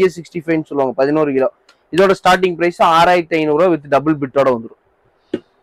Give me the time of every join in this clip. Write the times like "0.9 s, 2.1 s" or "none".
none